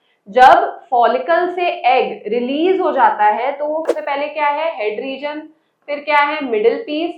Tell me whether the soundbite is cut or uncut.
cut